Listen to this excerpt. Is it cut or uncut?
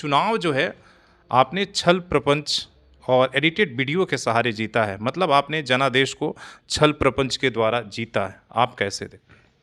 uncut